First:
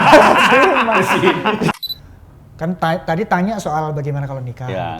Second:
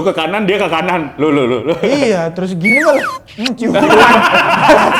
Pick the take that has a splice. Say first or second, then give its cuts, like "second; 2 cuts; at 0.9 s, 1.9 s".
first; 1 cut; at 1.7 s